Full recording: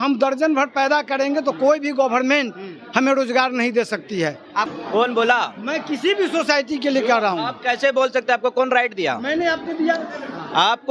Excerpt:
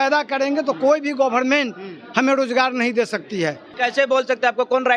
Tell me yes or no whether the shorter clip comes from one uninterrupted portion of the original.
no